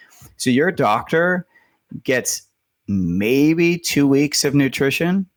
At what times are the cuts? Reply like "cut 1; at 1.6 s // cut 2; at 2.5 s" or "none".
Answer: none